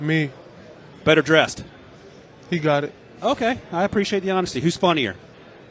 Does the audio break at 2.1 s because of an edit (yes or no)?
no